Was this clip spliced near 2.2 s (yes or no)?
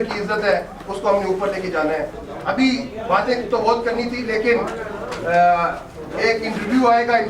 yes